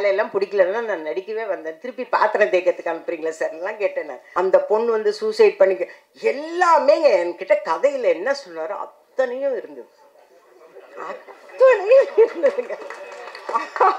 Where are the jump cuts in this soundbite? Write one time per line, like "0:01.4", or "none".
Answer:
0:04.2